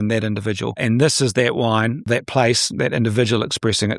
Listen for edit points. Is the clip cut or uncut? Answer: cut